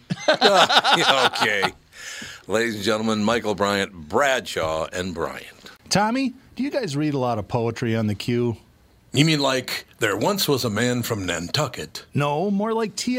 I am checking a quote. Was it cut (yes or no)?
yes